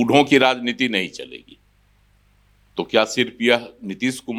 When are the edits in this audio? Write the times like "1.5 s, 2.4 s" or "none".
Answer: none